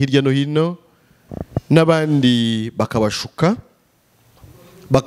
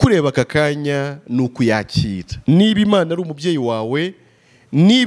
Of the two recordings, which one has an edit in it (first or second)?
second